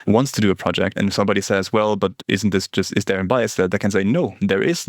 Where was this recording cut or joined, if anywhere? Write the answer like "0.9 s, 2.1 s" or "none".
0.9 s